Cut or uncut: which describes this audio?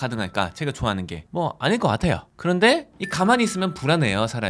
cut